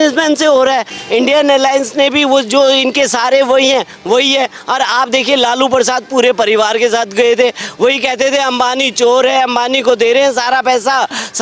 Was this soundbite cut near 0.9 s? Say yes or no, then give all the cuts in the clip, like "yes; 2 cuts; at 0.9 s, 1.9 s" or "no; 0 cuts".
yes; 1 cut; at 0.9 s